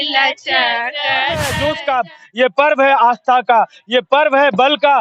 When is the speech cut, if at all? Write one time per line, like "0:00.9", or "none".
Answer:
0:01.4